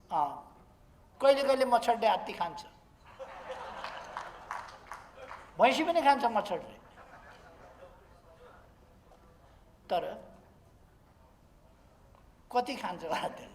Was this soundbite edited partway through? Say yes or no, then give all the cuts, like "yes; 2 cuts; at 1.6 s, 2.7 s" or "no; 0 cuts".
no; 0 cuts